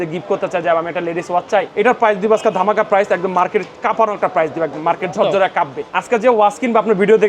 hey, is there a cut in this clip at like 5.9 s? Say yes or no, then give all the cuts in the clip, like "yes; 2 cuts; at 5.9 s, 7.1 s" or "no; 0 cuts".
yes; 2 cuts; at 1.7 s, 5.9 s